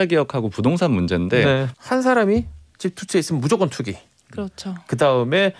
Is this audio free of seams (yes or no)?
no